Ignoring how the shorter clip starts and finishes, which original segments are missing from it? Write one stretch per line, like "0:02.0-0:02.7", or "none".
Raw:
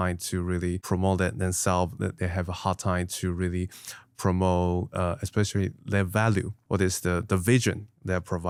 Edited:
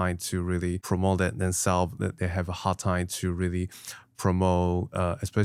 none

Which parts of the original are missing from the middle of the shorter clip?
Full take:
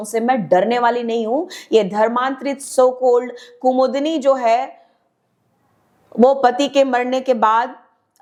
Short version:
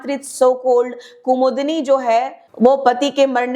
0:04.8-0:06.0

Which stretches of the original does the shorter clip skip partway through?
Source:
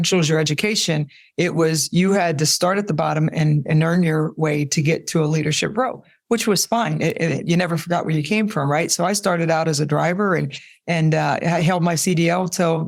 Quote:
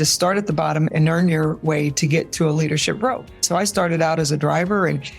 0:03.3-0:03.7
0:06.2-0:08.9

